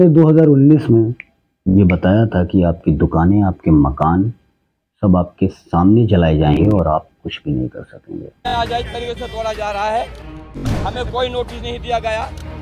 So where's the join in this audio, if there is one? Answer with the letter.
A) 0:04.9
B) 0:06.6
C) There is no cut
B